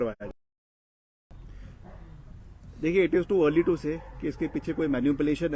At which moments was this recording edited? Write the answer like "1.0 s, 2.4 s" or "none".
1.3 s